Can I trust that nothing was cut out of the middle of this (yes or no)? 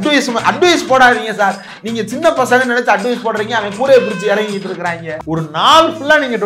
no